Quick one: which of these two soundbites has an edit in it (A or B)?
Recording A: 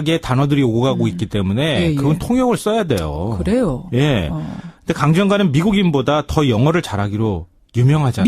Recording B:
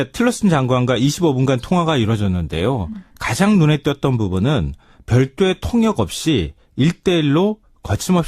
A